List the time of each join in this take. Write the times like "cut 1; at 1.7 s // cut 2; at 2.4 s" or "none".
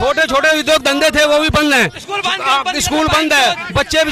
none